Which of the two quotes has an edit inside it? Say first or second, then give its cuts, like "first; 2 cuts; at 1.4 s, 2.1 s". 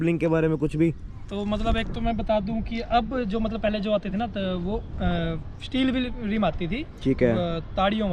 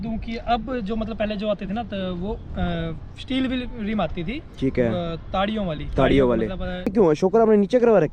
second; 1 cut; at 6.9 s